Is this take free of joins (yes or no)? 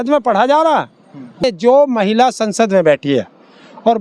no